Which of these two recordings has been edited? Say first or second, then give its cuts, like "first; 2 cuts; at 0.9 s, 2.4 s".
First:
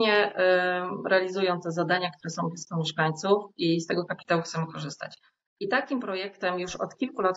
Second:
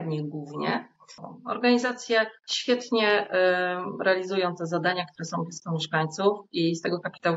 second; 1 cut; at 1.3 s